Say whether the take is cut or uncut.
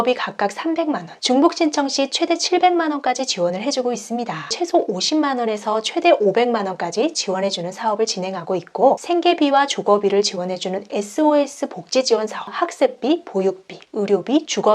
cut